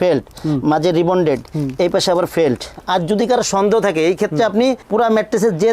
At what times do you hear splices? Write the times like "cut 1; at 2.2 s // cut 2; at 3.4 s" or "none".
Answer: cut 1; at 2.7 s